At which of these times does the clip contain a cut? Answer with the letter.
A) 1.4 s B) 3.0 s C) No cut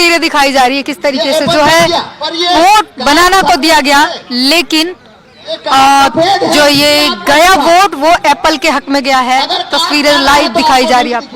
C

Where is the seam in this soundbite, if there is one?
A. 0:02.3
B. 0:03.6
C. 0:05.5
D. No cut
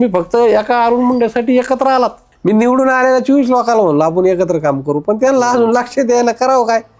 A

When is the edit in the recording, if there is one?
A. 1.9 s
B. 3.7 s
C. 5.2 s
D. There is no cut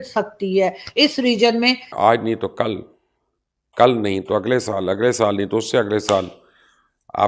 A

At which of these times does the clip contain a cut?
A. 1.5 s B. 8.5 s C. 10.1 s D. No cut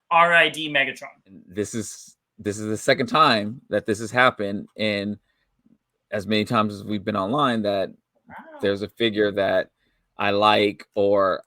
A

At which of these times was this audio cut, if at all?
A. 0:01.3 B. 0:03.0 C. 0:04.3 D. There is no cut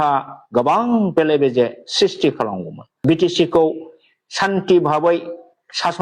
B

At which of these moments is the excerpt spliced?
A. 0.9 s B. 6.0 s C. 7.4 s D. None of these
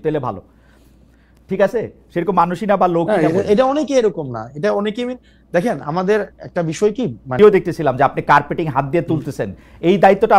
C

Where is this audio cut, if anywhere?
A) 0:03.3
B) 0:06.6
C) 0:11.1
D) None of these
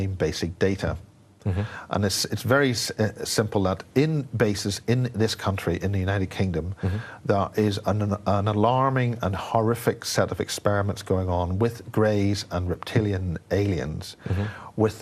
D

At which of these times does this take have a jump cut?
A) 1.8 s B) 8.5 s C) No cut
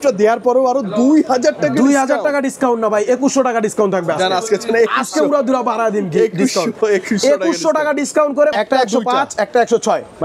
B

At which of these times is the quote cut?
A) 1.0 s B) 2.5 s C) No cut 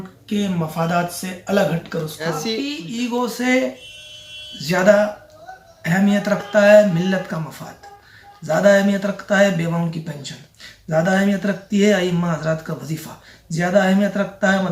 B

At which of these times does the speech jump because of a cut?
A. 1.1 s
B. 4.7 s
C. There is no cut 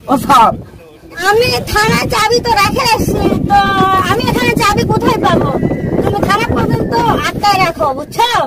A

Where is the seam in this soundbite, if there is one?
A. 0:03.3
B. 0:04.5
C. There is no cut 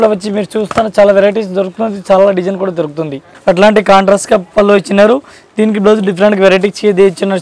A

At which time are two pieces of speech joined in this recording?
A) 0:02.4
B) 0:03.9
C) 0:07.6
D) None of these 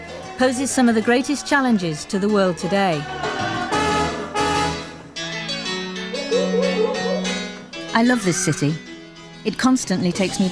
B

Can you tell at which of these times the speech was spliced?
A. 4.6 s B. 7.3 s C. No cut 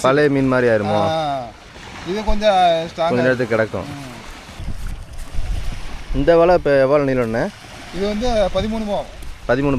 A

